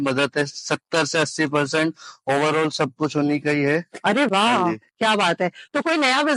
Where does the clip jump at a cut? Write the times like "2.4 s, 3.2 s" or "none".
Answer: none